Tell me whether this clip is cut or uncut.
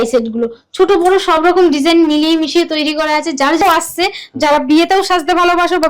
cut